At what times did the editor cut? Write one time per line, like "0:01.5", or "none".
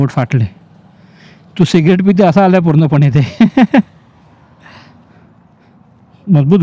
none